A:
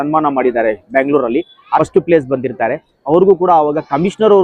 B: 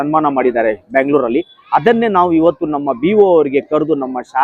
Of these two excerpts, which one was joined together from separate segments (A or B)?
A